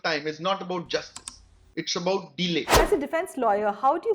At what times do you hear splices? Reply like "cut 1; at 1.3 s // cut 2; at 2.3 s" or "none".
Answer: cut 1; at 2.8 s